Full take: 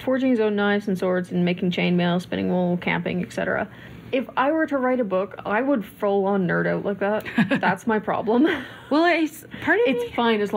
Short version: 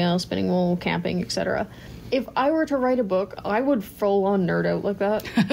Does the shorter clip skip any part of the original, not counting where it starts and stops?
no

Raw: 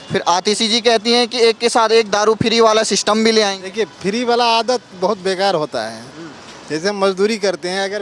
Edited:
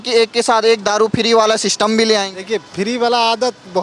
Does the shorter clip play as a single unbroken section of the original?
yes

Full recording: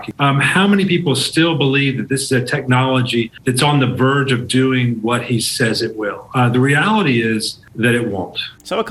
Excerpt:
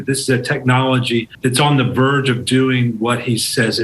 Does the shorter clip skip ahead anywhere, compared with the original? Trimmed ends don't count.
no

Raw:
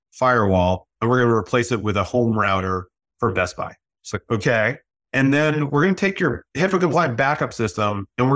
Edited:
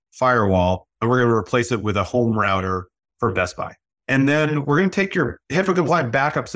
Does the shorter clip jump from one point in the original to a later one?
yes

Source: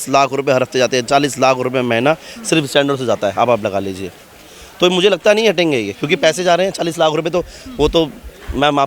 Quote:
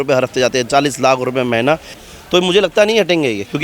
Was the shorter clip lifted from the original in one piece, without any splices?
no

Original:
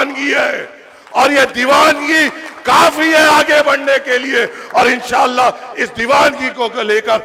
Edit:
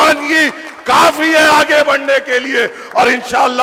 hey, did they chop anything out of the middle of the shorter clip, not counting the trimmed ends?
no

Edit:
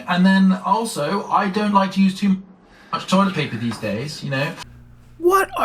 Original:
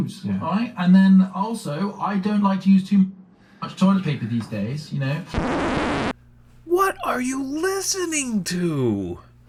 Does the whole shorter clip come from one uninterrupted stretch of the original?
no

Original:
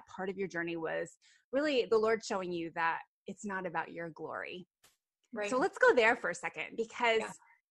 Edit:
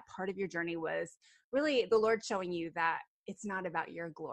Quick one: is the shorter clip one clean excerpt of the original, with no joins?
yes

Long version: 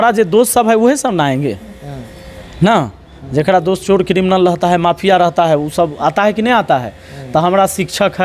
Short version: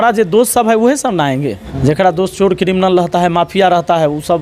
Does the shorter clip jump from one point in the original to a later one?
yes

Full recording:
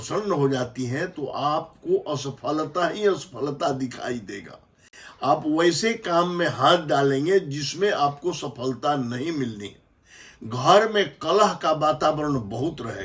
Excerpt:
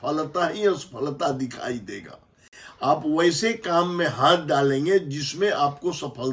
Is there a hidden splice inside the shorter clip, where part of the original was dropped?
no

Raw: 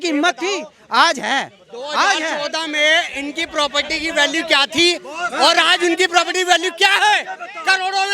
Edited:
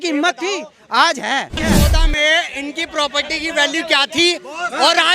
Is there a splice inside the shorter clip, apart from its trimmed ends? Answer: yes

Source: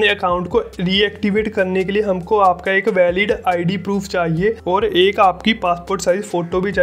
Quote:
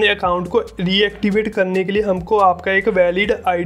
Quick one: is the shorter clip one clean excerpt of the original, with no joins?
yes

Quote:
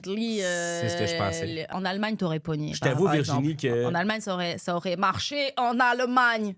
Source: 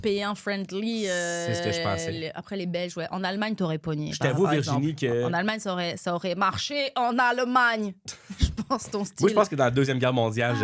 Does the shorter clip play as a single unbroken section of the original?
no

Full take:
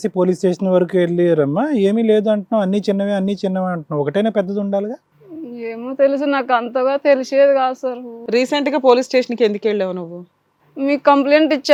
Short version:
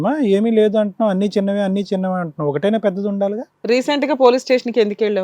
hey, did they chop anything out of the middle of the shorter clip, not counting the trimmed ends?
yes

